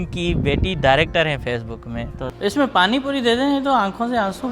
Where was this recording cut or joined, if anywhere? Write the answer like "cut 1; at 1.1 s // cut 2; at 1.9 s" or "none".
cut 1; at 2.2 s